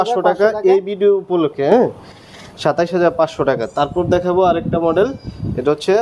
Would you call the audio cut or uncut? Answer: uncut